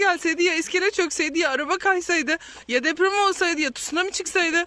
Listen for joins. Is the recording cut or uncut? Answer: uncut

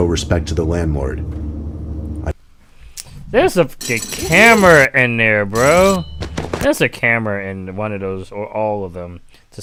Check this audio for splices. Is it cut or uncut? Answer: uncut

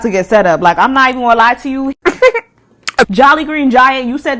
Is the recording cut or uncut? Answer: uncut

